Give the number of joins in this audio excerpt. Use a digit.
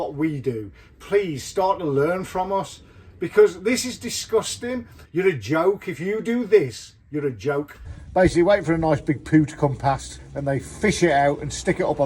2